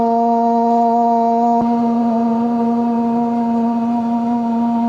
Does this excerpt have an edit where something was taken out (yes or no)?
yes